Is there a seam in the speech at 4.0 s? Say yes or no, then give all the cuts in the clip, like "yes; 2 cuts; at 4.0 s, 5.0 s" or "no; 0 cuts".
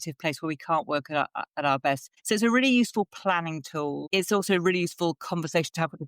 yes; 2 cuts; at 2.1 s, 4.0 s